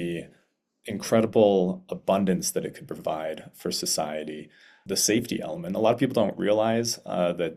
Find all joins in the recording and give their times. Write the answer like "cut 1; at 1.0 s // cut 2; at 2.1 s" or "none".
cut 1; at 4.7 s